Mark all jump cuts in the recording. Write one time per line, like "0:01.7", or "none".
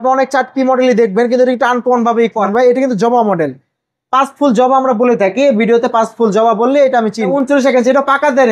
0:02.4
0:07.3